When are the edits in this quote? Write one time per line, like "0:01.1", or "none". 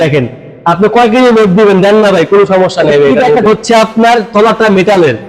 0:03.4

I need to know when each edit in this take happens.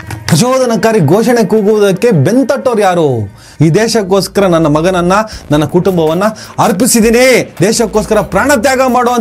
0:03.5

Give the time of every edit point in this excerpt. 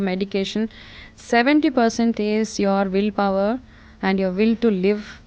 none

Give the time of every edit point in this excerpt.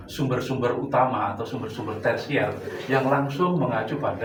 none

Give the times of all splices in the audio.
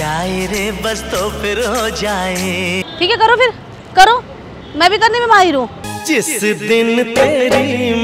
0:02.9

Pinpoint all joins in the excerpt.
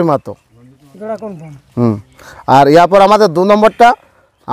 none

